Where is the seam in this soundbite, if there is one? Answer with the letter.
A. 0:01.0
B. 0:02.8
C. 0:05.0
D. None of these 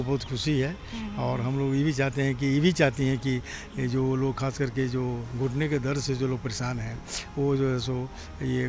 D